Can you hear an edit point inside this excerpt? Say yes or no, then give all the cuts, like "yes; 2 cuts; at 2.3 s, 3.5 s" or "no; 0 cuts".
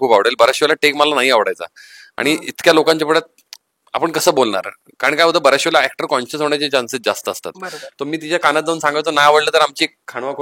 no; 0 cuts